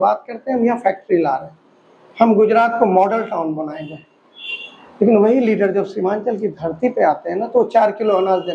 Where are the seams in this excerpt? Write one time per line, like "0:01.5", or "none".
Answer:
none

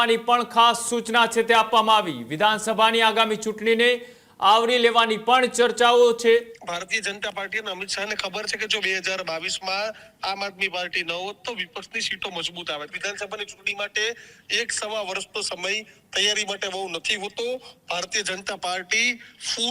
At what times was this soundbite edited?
0:06.6
0:12.9

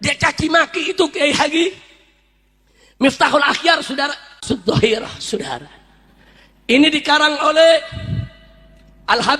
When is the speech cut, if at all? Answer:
0:04.4

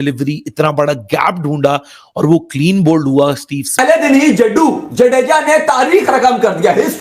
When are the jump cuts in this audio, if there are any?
0:04.0

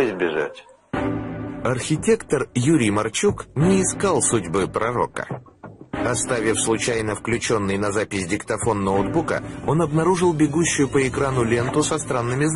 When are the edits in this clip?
none

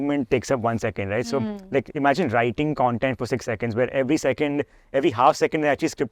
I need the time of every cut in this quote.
none

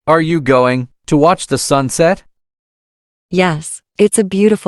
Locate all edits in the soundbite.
none

